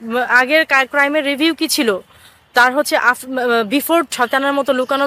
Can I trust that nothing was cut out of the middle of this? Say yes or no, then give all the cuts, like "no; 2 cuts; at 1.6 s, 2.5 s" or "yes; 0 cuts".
no; 1 cut; at 4.1 s